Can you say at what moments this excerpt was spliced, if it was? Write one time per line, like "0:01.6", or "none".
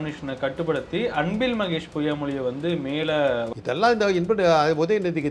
0:03.5